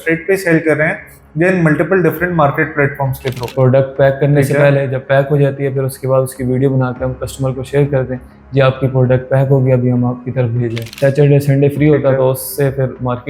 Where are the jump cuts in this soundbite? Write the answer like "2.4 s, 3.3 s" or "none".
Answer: 3.4 s, 10.9 s